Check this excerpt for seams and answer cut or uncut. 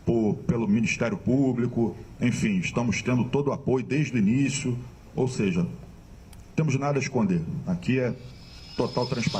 uncut